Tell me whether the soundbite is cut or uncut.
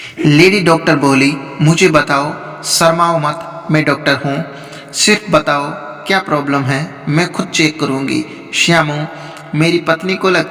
uncut